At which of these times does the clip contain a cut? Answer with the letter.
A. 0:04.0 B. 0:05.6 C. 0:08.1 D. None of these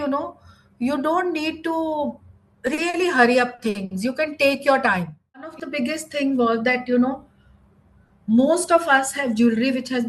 B